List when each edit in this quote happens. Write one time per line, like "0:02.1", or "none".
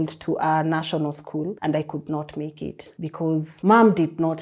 0:01.6
0:03.1